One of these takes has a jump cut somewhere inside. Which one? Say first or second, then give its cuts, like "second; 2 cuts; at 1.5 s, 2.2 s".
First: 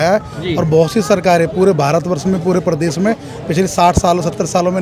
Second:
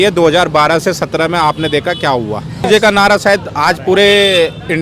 second; 1 cut; at 2.7 s